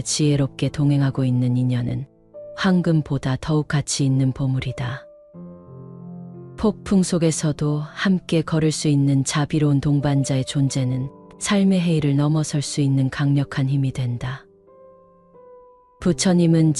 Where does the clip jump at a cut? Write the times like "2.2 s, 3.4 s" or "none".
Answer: 14.4 s, 16.0 s